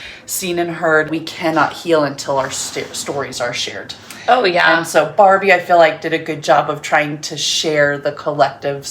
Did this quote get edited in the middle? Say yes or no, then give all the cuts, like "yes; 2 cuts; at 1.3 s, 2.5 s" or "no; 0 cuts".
yes; 1 cut; at 1.1 s